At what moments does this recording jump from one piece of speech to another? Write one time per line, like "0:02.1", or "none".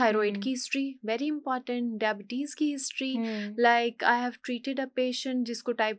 none